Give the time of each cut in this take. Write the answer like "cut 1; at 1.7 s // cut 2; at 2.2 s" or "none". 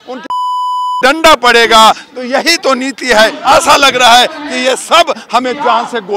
cut 1; at 3.4 s

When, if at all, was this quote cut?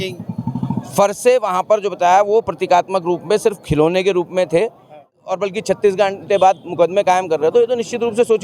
cut 1; at 5.2 s

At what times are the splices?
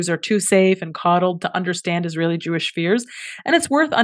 none

